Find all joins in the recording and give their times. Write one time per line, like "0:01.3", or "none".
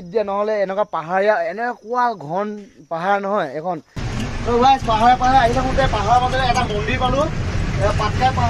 0:04.0